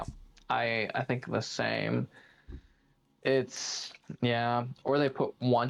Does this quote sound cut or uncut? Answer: uncut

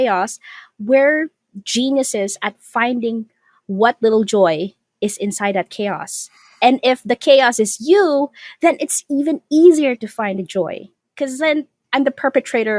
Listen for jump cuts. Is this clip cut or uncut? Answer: uncut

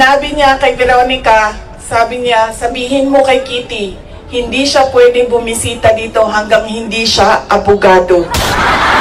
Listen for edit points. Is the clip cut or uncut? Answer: uncut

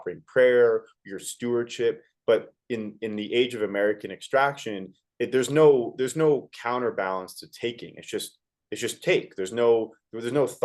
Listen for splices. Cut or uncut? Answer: uncut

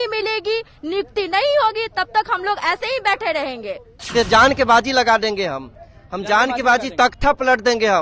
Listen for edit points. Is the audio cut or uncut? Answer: cut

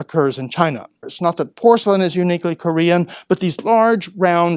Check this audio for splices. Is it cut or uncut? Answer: cut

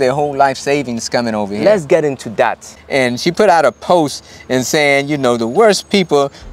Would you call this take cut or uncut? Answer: cut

